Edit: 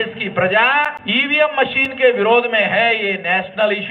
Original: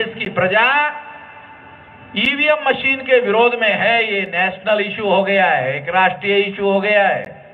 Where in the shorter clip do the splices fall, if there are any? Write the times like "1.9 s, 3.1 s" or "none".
1.0 s